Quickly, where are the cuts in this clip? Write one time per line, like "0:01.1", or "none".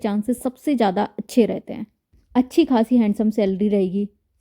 0:01.7